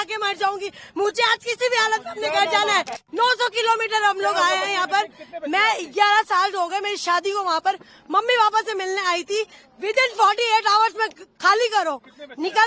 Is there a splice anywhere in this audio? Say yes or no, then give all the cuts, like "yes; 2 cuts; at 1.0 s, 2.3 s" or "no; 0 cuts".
yes; 1 cut; at 3.0 s